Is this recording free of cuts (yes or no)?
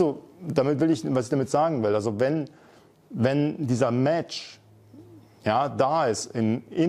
yes